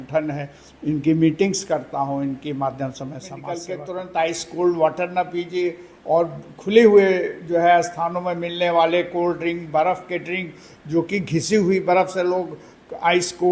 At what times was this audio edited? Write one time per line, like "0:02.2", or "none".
0:03.5